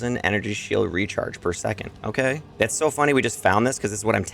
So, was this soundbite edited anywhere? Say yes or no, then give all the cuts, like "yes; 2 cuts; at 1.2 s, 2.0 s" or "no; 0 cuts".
yes; 1 cut; at 2.5 s